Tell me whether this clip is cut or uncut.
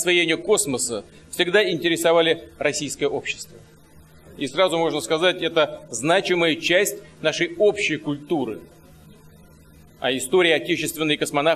cut